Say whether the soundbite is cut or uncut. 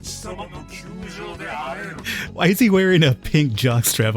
cut